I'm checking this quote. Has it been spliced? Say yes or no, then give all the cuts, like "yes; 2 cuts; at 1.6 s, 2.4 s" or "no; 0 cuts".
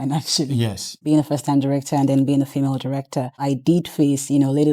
yes; 2 cuts; at 0.9 s, 3.3 s